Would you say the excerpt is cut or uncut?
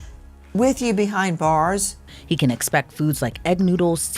cut